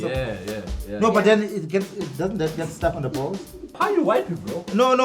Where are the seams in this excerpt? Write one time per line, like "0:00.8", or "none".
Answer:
0:03.7